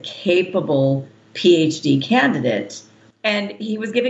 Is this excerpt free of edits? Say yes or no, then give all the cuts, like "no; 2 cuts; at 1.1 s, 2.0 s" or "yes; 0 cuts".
no; 1 cut; at 3.1 s